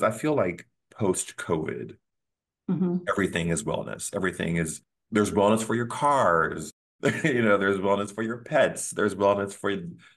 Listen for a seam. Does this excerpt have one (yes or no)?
no